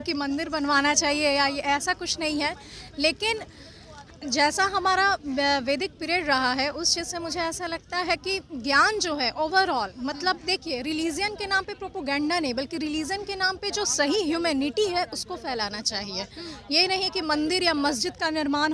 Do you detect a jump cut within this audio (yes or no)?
no